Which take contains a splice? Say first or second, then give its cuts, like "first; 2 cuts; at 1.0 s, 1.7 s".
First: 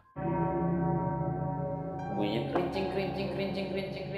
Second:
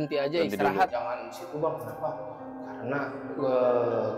second; 1 cut; at 0.9 s